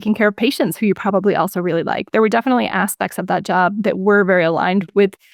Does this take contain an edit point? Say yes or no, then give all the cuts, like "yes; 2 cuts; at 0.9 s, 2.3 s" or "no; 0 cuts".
no; 0 cuts